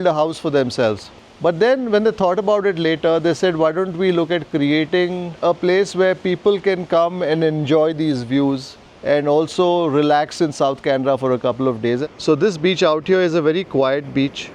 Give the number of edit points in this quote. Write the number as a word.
two